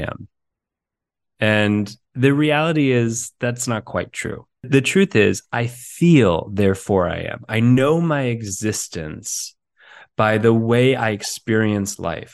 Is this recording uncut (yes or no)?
no